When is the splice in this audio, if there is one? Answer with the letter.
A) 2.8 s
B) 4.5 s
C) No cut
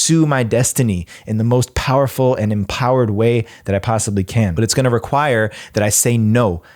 B